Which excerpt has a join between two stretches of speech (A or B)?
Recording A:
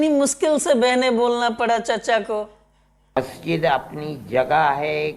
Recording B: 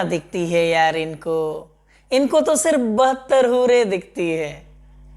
A